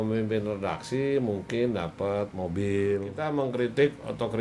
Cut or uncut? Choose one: cut